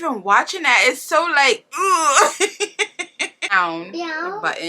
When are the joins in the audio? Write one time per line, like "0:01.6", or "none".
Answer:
0:03.5